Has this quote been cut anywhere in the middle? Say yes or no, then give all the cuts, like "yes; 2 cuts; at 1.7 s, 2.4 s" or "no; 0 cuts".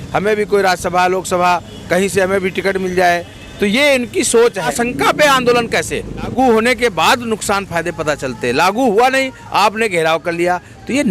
yes; 2 cuts; at 4.7 s, 6.3 s